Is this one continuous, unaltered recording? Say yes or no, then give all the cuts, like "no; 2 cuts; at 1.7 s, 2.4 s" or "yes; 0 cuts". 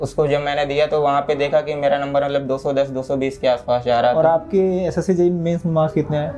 yes; 0 cuts